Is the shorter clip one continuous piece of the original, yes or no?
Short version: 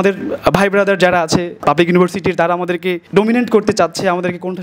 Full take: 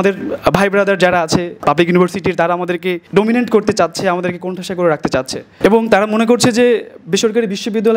yes